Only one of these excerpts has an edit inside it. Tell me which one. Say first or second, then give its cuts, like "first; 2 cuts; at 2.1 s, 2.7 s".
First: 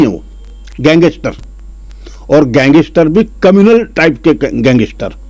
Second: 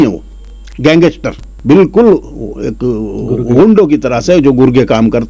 second; 1 cut; at 1.5 s